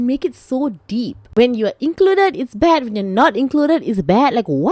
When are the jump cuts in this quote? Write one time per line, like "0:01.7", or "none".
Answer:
0:01.3